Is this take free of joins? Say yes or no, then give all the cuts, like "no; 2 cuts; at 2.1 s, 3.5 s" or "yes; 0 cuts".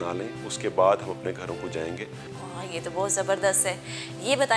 yes; 0 cuts